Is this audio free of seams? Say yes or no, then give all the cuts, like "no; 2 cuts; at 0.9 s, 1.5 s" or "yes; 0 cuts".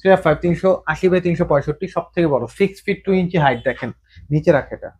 yes; 0 cuts